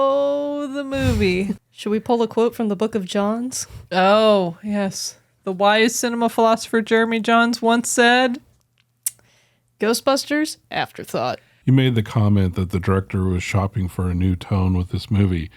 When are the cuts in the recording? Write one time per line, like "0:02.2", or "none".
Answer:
0:01.6
0:11.5